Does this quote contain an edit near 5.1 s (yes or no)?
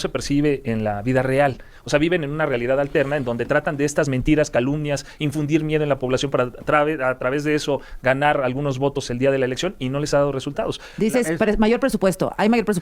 no